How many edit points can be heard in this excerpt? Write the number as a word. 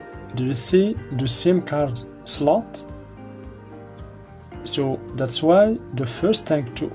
zero